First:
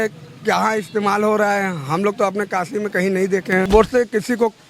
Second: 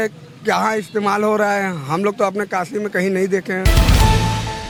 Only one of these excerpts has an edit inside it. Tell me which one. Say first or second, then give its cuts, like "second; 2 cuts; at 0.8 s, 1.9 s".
first; 1 cut; at 3.7 s